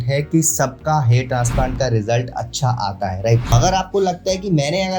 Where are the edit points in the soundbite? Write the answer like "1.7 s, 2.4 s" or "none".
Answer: 3.5 s